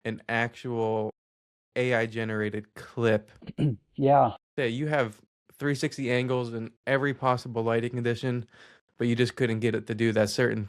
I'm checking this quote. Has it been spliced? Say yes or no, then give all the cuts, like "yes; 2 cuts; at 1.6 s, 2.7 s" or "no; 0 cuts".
yes; 1 cut; at 4.5 s